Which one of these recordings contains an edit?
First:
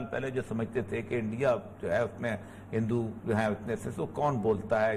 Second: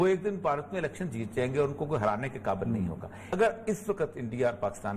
second; 1 cut; at 3.3 s

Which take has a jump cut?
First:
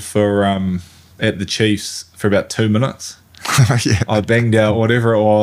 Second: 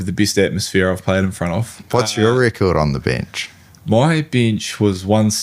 second; 1 cut; at 1.8 s

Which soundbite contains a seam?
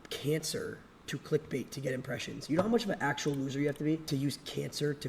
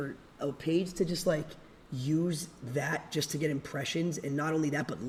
first; 1 cut; at 4.0 s

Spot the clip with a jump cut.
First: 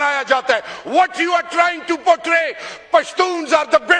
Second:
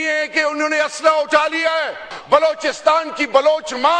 second; 1 cut; at 2.1 s

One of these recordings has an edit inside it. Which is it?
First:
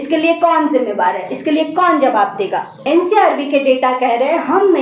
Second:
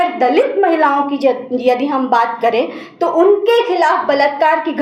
first; 1 cut; at 2.8 s

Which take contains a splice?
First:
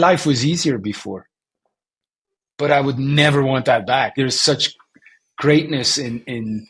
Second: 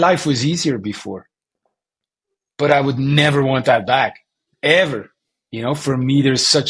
first; 1 cut; at 4.2 s

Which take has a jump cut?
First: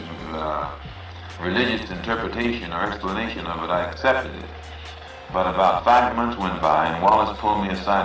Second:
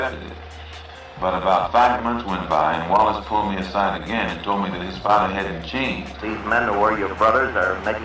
second; 1 cut; at 6.2 s

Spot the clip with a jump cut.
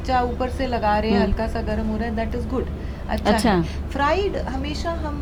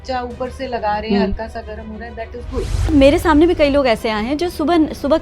second; 1 cut; at 2.9 s

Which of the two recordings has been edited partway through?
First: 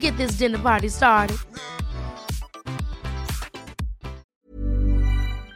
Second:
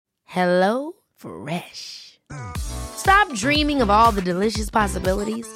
first; 1 cut; at 4.2 s

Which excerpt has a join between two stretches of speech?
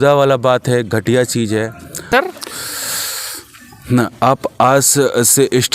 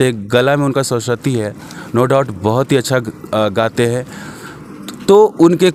first; 1 cut; at 2.1 s

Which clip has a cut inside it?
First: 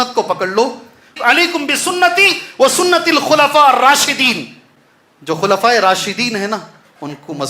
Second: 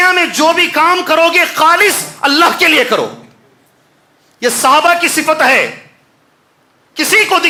first; 1 cut; at 1.1 s

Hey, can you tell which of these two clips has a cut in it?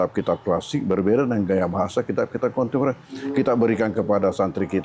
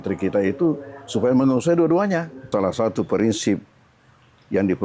second; 1 cut; at 2.5 s

